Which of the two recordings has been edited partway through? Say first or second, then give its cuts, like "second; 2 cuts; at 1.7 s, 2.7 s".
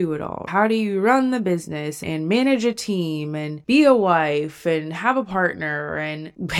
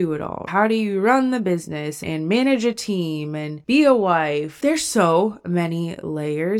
second; 1 cut; at 4.6 s